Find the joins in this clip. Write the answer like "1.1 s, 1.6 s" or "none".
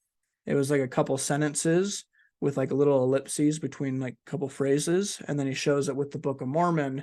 none